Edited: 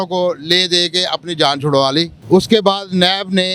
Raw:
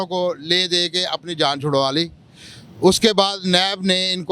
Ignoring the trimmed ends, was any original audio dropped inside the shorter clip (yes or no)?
yes